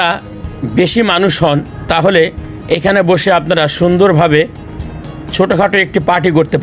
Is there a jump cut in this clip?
no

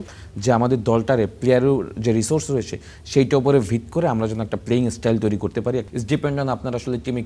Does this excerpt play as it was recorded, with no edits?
no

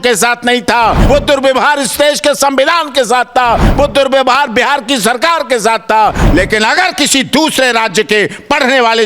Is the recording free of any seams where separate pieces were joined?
no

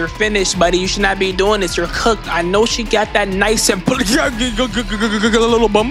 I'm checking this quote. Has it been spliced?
no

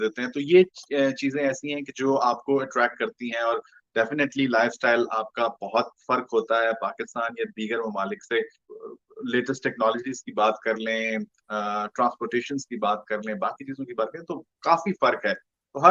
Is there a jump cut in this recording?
no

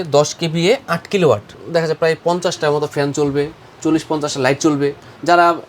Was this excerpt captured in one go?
no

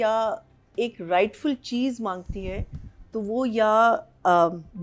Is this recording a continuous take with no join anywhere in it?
yes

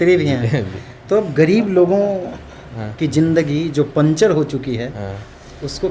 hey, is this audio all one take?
yes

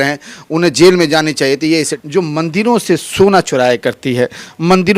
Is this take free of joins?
no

